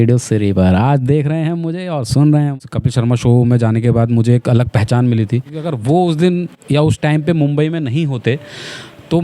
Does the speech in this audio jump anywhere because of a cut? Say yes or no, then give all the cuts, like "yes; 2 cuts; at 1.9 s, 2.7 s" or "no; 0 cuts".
yes; 2 cuts; at 2.5 s, 5.7 s